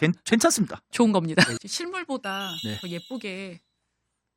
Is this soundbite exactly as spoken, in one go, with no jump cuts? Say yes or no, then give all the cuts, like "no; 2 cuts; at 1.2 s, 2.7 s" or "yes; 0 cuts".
no; 1 cut; at 1.5 s